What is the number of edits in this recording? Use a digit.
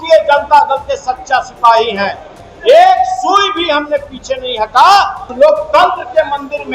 1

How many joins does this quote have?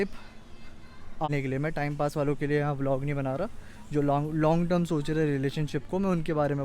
1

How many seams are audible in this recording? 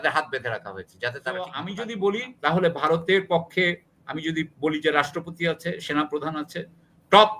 1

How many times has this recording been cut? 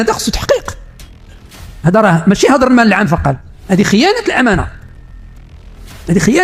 0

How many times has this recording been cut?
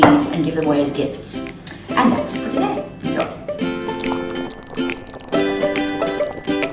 1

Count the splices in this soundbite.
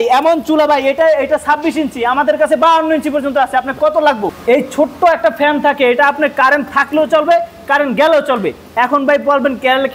1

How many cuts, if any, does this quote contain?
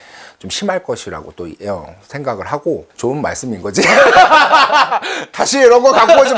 1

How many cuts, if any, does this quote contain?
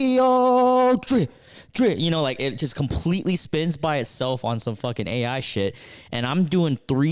0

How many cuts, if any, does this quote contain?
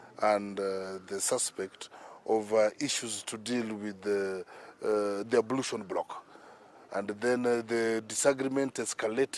0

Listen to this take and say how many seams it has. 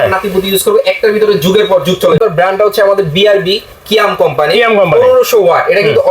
1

